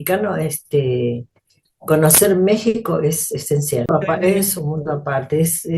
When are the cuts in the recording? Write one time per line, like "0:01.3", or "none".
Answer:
0:03.9